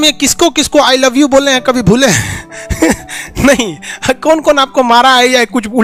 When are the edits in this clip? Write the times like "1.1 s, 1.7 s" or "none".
none